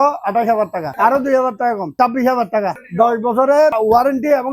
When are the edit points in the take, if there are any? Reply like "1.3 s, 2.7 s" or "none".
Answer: 0.9 s, 1.9 s, 2.8 s, 3.8 s